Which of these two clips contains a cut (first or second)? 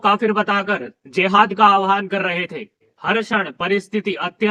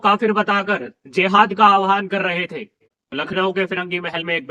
second